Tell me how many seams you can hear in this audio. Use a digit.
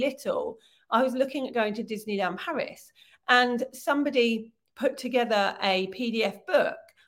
0